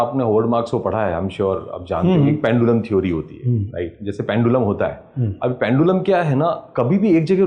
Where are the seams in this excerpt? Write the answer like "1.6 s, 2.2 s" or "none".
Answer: none